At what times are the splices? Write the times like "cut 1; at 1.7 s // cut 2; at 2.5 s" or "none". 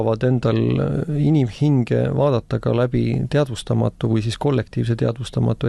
none